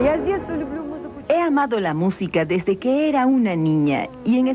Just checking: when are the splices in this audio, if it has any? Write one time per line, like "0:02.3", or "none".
0:01.0